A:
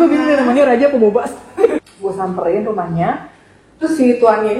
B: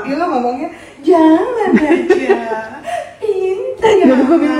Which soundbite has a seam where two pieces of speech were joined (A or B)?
A